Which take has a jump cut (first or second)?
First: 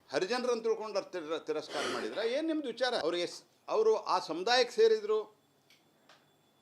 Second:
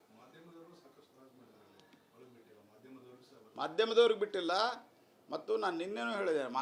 first